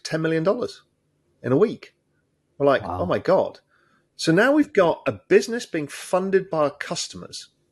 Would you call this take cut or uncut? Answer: uncut